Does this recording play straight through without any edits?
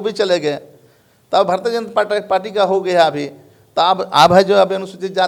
yes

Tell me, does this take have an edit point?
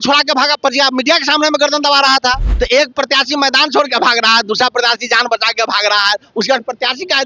yes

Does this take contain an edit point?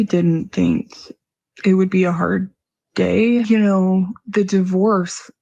no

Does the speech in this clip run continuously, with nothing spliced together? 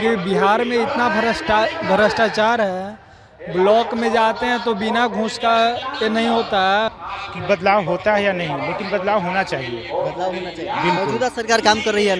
no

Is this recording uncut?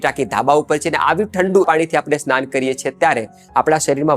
no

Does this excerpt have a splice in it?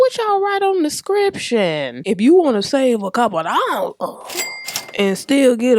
yes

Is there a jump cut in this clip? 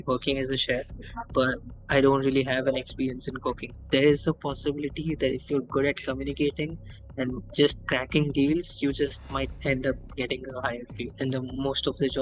yes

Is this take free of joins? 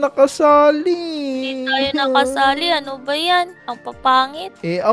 no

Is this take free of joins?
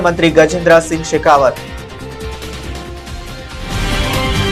no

